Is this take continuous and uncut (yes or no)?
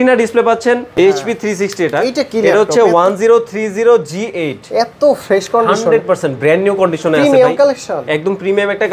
no